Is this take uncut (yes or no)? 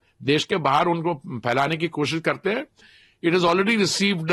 yes